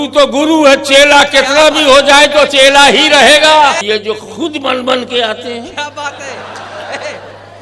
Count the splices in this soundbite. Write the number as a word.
one